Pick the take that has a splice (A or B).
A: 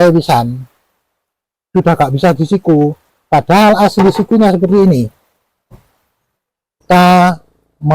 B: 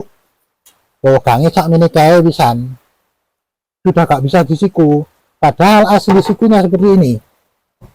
A